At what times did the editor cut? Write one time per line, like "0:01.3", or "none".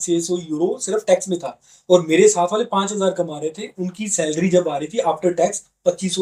none

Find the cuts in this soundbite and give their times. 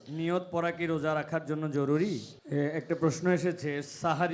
0:02.3

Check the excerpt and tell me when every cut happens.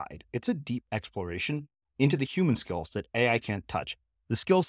none

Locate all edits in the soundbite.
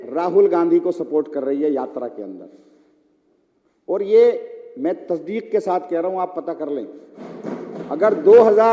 0:07.2

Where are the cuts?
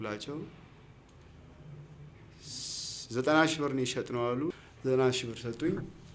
0:04.5

